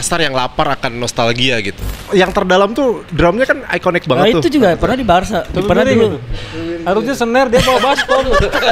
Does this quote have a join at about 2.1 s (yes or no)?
yes